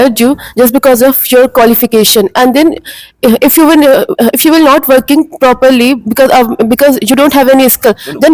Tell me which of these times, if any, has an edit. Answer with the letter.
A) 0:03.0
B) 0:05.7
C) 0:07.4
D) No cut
D